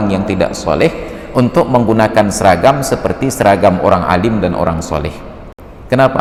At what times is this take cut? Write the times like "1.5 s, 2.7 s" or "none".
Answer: none